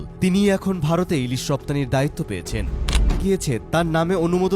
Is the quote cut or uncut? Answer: cut